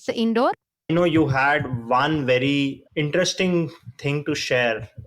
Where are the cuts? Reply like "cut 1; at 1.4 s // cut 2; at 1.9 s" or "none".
cut 1; at 0.9 s